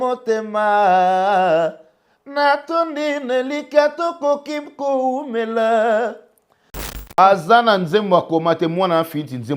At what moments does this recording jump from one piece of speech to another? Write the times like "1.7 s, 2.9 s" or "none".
6.8 s